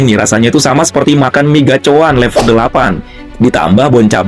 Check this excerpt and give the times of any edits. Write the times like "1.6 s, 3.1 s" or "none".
none